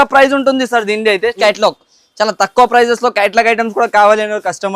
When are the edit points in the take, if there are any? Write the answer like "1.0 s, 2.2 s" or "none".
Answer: 1.4 s